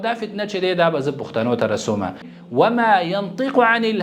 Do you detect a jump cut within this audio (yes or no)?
yes